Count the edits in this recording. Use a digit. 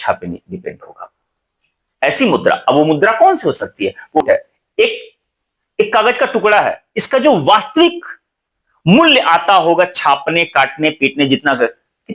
1